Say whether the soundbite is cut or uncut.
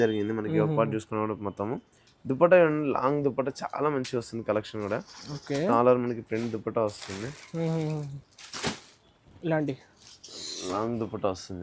uncut